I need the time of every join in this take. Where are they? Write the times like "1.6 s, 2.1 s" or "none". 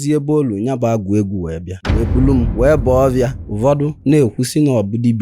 3.4 s

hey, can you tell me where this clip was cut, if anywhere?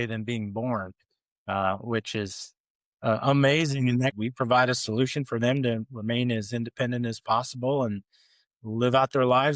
4.2 s

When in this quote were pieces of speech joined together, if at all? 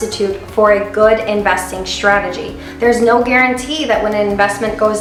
none

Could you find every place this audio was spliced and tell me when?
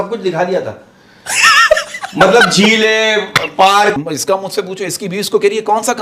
4.0 s

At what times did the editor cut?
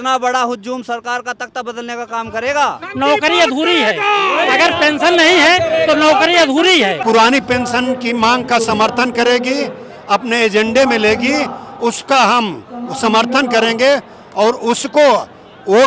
2.8 s, 7.0 s

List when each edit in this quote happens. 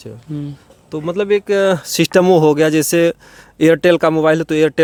none

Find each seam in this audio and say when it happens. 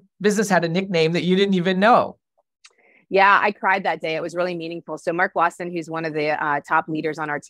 none

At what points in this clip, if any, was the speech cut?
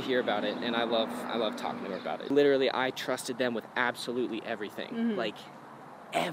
2.2 s

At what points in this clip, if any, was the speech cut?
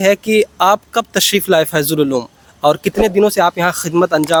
none

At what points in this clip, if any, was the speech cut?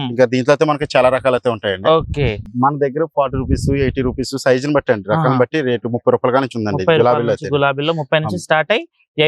2.4 s

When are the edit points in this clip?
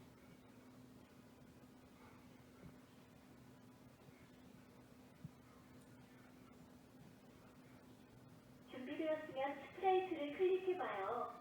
10.1 s

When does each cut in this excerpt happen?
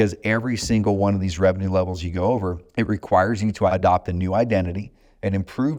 2.6 s, 3.7 s

